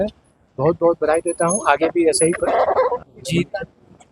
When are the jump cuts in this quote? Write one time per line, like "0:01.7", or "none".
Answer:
0:03.0